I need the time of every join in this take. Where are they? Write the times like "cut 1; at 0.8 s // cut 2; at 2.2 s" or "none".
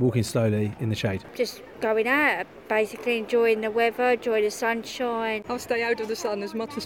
cut 1; at 1.5 s // cut 2; at 5.4 s